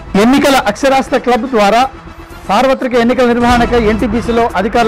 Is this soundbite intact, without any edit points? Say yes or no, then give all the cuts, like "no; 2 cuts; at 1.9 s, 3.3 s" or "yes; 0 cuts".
yes; 0 cuts